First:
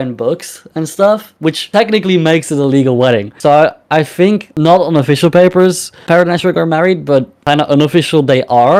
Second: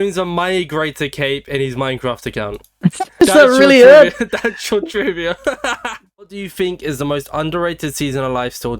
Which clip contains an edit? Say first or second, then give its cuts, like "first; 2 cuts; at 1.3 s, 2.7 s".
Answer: second; 1 cut; at 6.0 s